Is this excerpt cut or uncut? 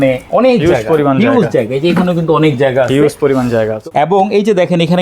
cut